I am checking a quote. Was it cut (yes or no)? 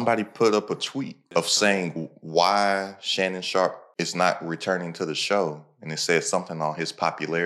yes